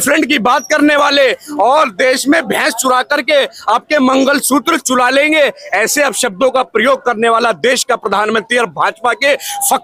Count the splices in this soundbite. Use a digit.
0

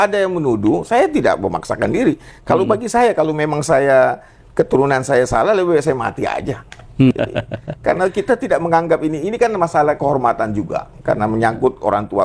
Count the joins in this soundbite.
1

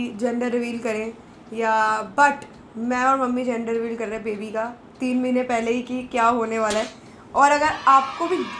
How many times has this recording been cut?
0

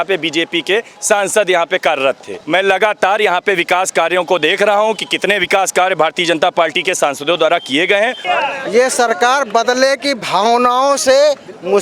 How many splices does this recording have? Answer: 2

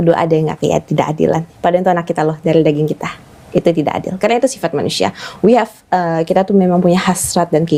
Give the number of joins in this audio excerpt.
0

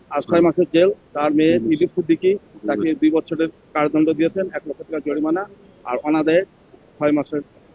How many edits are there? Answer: 1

